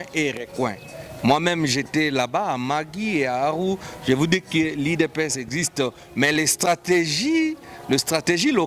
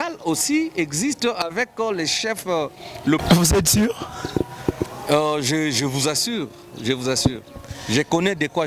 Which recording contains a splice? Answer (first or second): second